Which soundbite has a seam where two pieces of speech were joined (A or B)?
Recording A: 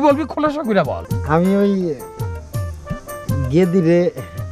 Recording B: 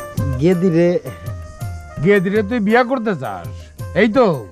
A